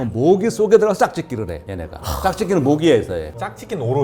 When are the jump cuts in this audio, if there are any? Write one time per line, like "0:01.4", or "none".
none